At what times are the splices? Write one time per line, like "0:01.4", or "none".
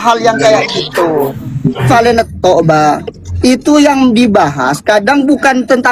0:01.9